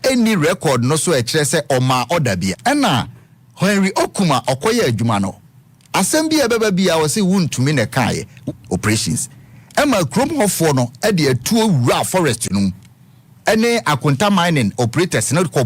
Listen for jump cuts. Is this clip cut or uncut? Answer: cut